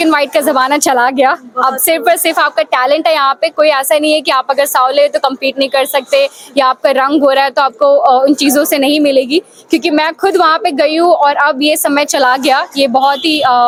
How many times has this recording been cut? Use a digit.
0